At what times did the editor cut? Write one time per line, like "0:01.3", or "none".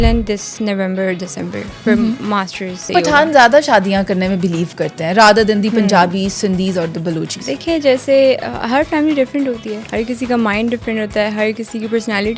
0:02.8
0:07.4
0:09.8